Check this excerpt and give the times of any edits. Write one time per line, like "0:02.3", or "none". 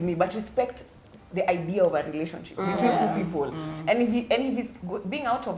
none